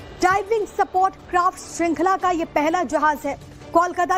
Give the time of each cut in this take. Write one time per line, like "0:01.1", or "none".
none